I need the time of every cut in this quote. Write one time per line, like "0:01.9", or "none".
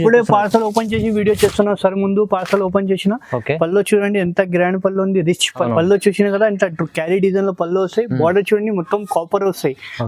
0:05.6